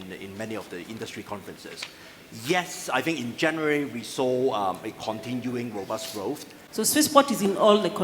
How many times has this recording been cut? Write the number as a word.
one